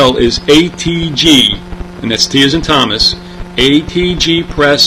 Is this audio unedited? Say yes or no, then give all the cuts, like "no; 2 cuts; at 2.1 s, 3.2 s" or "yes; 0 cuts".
yes; 0 cuts